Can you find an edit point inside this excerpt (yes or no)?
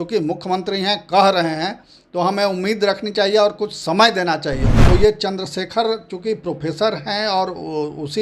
yes